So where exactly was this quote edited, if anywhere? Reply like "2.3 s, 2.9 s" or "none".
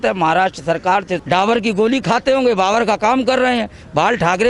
1.1 s